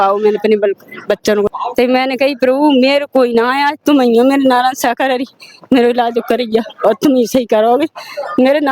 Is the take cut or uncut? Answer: cut